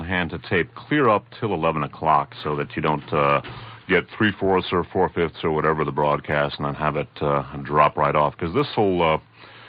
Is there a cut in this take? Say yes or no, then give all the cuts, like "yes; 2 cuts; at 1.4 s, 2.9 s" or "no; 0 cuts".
yes; 1 cut; at 1.3 s